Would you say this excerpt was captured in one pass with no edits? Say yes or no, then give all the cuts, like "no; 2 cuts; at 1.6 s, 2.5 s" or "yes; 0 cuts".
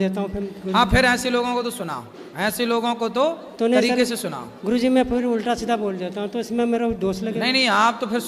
yes; 0 cuts